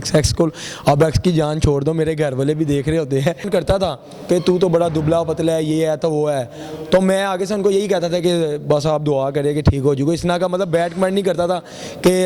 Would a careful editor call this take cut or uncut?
cut